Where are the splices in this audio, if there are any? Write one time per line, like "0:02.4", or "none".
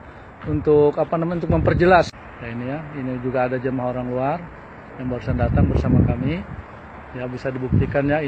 0:02.2